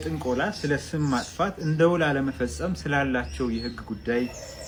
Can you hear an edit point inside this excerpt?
no; 0 cuts

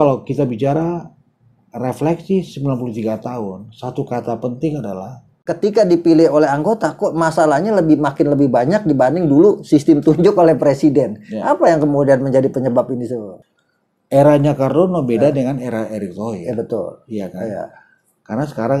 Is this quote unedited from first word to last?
no; 2 cuts; at 5.4 s, 13.4 s

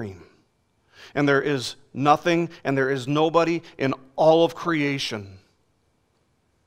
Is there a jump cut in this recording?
no; 0 cuts

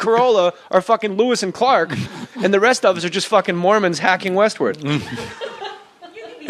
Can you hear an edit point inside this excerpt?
no; 0 cuts

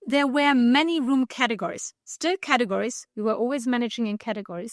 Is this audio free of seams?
yes; 0 cuts

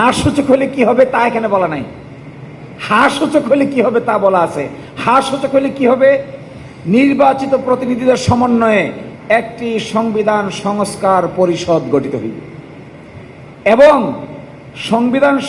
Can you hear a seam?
no; 0 cuts

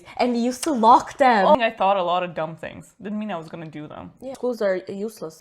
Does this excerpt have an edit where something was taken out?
yes; 2 cuts; at 1.5 s, 4.3 s

